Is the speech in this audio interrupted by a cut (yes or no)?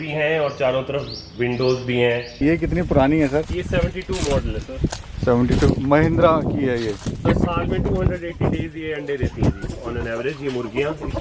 yes